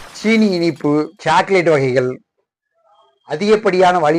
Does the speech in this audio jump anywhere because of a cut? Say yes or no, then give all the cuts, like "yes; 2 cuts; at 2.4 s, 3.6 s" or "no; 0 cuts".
yes; 1 cut; at 1.1 s